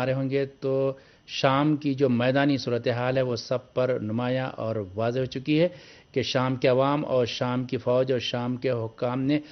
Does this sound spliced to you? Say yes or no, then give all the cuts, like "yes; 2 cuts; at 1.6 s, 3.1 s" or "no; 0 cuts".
yes; 1 cut; at 3.2 s